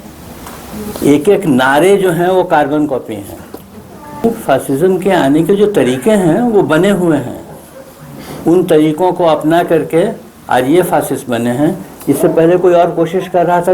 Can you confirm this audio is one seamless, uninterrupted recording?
no; 1 cut; at 4.2 s

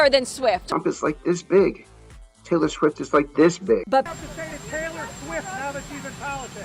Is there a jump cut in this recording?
yes; 1 cut; at 4.1 s

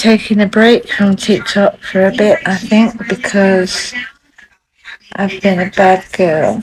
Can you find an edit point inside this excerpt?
no; 0 cuts

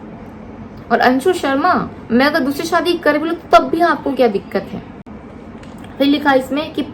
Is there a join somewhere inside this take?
no; 0 cuts

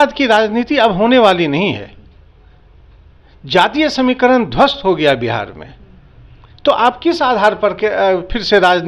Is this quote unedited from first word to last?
yes; 0 cuts

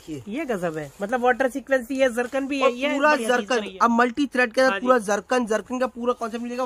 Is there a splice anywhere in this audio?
no; 0 cuts

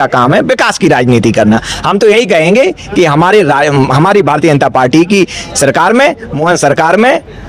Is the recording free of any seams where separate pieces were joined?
yes; 0 cuts

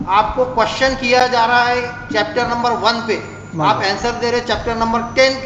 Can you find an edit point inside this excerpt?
no; 0 cuts

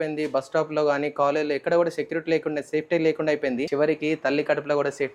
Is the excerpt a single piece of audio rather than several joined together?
no; 1 cut; at 3.7 s

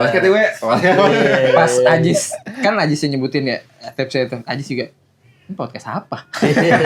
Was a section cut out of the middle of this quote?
no; 0 cuts

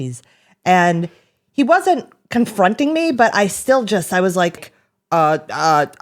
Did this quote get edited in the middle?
yes; 1 cut; at 4.6 s

